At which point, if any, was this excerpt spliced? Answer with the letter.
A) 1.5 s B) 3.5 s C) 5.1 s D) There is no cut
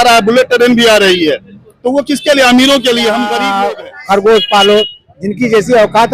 B